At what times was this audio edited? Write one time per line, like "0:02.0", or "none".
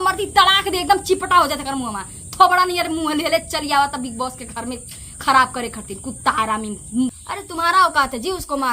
0:07.3